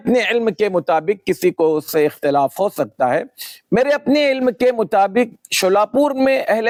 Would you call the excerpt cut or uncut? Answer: uncut